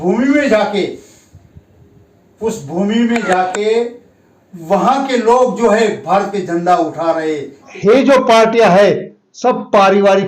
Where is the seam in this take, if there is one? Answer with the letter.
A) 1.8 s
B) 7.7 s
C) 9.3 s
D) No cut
B